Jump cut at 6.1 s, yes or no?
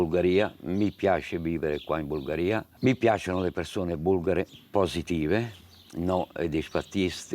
no